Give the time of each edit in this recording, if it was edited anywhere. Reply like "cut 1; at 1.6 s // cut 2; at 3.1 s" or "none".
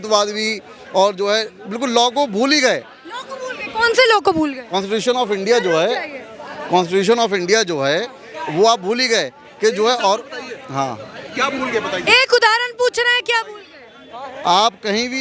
none